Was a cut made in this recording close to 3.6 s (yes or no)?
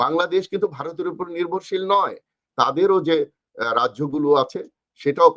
no